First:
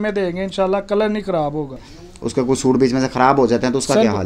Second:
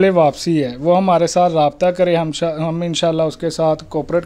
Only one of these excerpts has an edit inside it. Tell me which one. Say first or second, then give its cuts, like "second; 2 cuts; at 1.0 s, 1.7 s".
first; 1 cut; at 1.9 s